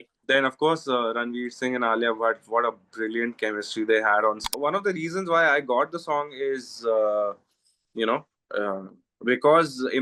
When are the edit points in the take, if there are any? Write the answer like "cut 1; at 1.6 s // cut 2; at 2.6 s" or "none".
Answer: cut 1; at 4.5 s